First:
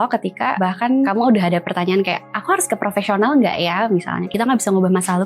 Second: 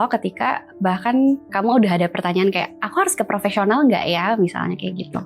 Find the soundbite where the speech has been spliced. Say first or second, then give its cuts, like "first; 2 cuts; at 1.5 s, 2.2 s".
first; 2 cuts; at 0.9 s, 4.3 s